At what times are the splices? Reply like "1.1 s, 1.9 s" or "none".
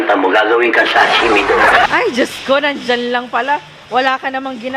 1.9 s